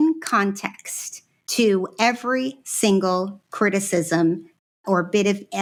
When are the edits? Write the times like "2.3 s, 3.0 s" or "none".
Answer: none